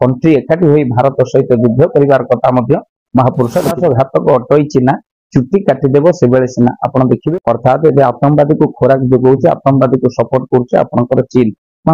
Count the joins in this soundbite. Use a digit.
2